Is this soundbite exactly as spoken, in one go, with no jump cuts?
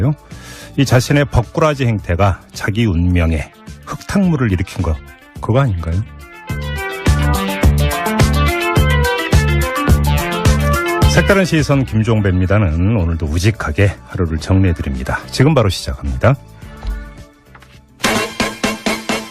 no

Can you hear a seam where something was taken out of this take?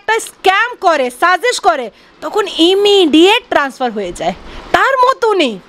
no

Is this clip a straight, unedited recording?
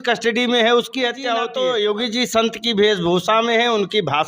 no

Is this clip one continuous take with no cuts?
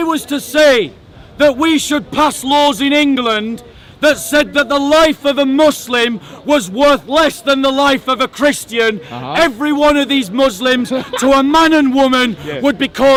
yes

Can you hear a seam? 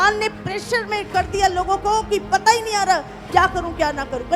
no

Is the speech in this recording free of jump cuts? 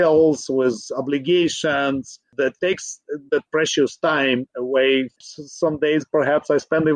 no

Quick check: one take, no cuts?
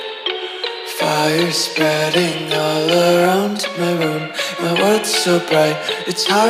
yes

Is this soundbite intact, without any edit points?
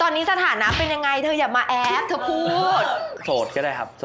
no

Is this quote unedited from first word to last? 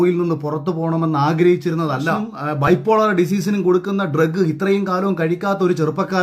no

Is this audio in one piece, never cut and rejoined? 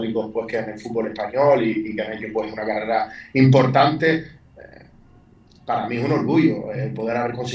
yes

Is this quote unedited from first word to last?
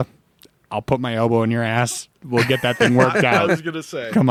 yes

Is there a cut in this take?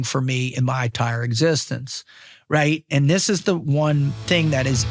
no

